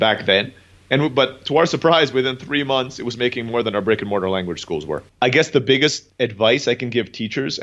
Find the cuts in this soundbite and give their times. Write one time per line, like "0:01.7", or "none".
0:05.0
0:06.0